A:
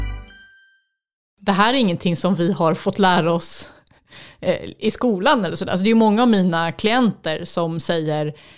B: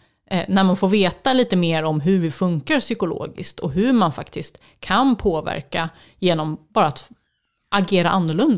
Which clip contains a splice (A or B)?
A